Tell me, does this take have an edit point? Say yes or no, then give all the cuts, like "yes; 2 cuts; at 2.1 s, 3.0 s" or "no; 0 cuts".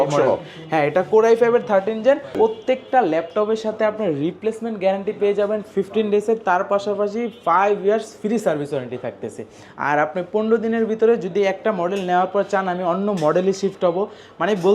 yes; 1 cut; at 2.4 s